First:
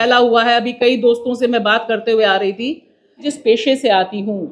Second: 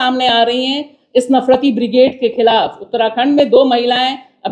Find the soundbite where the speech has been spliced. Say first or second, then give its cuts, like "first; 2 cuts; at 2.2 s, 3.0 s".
first; 1 cut; at 3.3 s